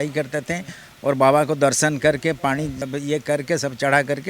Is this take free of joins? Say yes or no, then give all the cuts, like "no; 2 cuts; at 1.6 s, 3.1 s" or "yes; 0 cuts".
no; 1 cut; at 2.8 s